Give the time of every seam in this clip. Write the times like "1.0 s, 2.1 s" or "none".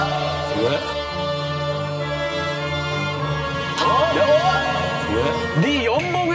5.4 s